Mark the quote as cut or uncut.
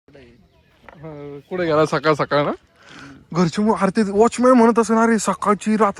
uncut